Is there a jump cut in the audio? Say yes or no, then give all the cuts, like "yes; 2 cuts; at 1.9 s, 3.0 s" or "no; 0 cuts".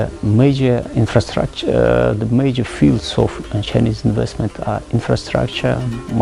no; 0 cuts